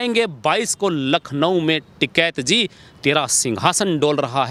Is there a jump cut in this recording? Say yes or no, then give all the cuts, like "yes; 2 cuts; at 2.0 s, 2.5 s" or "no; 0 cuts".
no; 0 cuts